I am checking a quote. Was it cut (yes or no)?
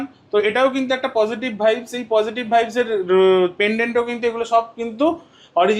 no